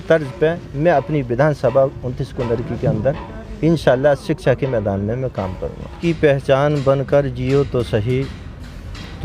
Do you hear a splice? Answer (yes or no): yes